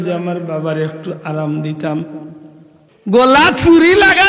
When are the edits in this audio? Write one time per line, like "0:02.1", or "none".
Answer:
0:02.9